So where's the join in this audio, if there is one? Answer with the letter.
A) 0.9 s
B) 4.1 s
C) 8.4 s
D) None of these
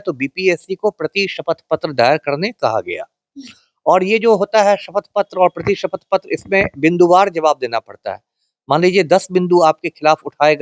D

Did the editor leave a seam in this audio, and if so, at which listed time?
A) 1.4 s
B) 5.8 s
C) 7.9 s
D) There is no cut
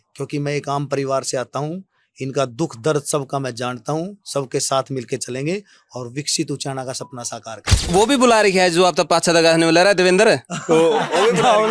C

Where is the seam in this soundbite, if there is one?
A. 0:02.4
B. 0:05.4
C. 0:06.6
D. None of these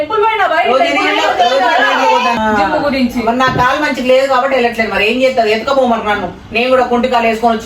A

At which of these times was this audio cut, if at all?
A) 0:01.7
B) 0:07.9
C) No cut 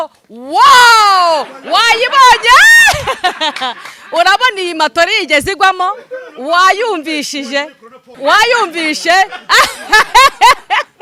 C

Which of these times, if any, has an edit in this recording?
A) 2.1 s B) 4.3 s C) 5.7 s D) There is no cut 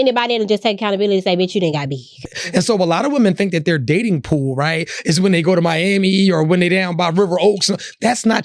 A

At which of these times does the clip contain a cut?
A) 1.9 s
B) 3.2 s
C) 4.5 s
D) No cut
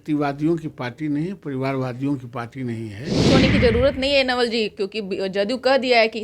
B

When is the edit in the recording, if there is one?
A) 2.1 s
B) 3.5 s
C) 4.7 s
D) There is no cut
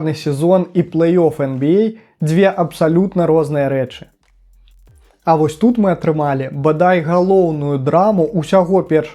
C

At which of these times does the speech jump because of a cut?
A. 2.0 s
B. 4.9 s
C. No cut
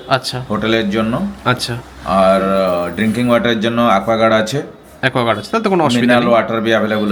C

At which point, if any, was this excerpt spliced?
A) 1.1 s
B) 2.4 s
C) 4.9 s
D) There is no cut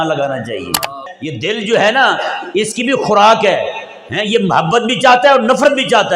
A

